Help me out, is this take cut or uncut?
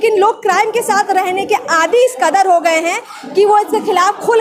uncut